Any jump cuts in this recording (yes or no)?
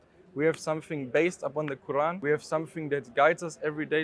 yes